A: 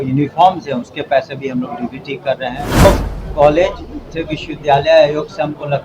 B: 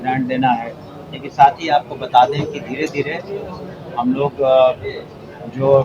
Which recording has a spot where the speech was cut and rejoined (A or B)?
A